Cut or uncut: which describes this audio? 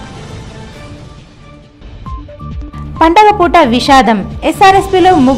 uncut